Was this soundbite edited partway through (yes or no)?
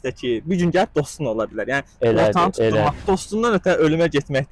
yes